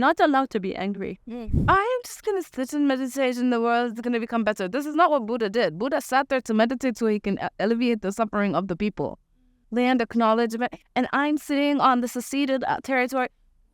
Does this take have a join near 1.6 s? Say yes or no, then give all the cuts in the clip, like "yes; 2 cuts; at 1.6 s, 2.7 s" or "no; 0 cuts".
yes; 2 cuts; at 1.6 s, 9.6 s